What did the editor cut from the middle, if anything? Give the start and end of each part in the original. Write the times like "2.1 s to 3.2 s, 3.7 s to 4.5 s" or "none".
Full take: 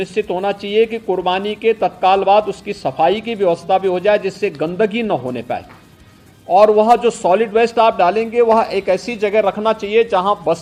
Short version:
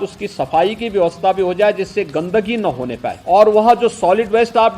5.6 s to 6.4 s

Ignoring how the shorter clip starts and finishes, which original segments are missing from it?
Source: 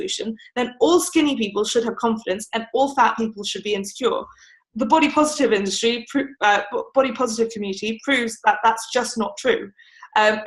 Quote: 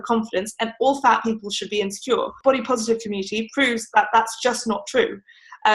4.3 s to 6.9 s

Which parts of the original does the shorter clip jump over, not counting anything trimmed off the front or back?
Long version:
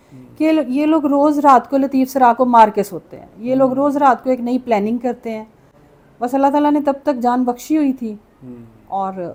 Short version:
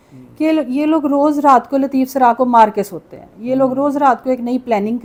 none

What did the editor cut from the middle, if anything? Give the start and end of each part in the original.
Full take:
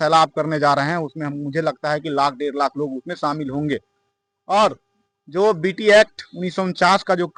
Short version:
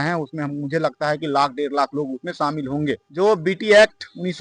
3.9 s to 5.2 s

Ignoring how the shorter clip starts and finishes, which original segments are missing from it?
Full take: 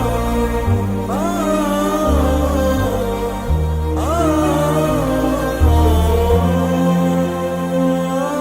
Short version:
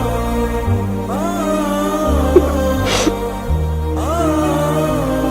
none

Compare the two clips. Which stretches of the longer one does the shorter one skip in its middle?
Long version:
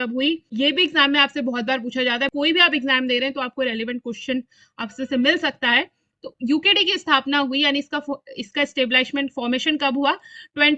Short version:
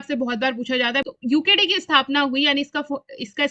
2.3 s to 6.2 s

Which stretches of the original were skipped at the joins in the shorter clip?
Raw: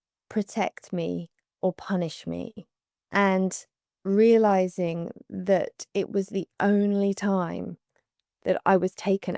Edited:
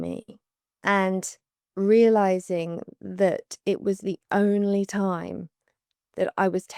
none

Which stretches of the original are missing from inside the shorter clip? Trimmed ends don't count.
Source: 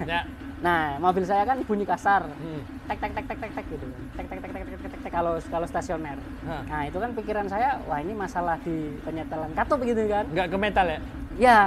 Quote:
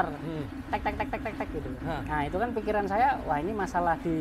3.9 s to 6.4 s

